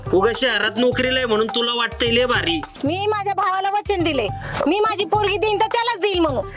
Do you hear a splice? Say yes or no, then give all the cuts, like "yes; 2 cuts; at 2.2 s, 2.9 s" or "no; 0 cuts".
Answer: yes; 1 cut; at 2.7 s